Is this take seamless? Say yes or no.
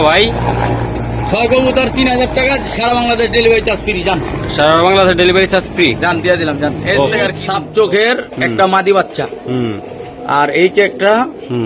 no